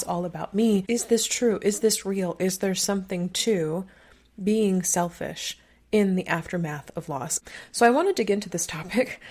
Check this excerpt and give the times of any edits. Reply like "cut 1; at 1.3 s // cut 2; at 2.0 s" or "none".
cut 1; at 0.8 s // cut 2; at 7.3 s